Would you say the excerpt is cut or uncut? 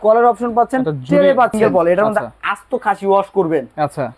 cut